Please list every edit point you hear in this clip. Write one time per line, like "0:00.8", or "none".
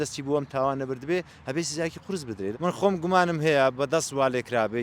0:02.5